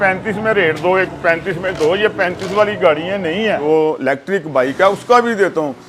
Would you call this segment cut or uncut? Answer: cut